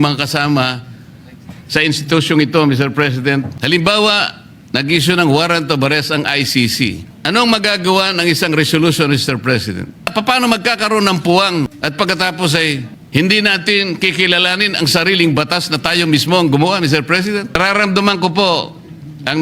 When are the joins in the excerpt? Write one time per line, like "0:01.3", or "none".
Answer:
0:03.5
0:07.1
0:10.1
0:11.8
0:12.9
0:17.6

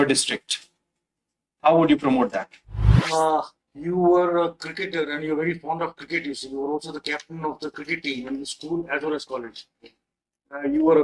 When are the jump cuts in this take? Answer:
0:03.0

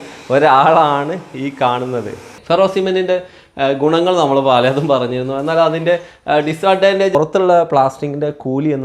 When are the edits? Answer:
0:02.3
0:07.1

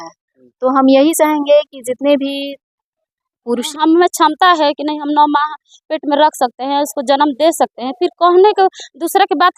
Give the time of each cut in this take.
0:03.6

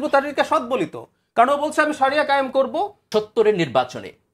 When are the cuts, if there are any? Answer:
0:03.0

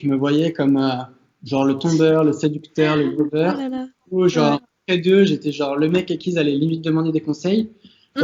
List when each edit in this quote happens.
none

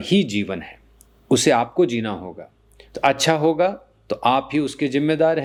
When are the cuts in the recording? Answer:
none

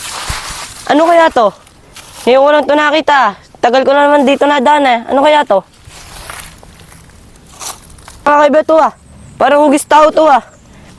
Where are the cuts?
none

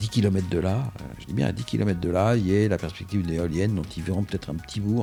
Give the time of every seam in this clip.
none

